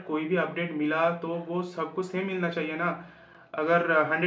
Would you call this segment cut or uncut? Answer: uncut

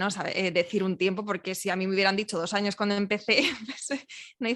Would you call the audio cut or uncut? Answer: uncut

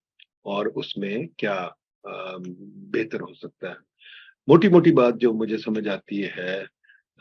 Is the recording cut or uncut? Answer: uncut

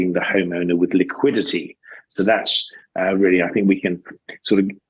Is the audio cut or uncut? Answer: uncut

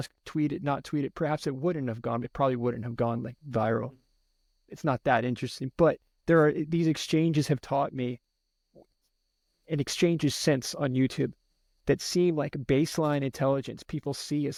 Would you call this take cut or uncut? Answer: uncut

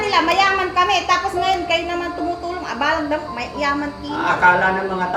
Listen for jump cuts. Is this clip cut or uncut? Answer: uncut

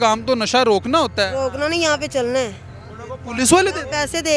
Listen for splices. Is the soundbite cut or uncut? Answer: uncut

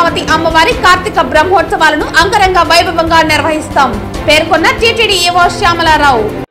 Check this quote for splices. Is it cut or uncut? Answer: uncut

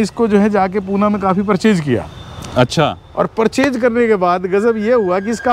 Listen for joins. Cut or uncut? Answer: uncut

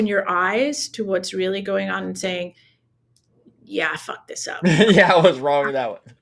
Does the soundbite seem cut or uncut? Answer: uncut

